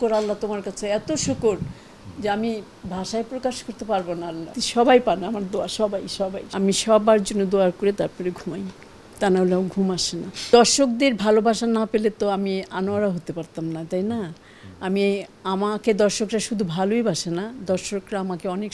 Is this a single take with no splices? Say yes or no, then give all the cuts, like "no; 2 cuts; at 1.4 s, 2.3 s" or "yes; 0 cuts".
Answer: no; 3 cuts; at 4.6 s, 6.4 s, 10.3 s